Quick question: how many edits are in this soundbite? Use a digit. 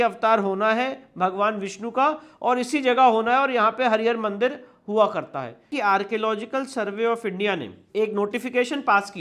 1